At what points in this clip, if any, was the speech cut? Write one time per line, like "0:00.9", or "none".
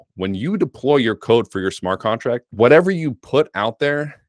0:02.5